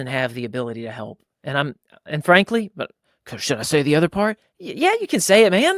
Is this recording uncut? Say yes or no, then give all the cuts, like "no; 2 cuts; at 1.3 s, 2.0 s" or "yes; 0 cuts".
yes; 0 cuts